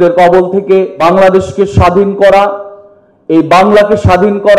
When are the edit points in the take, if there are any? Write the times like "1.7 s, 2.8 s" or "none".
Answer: 0.9 s